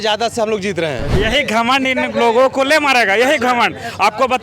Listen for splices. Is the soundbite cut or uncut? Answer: cut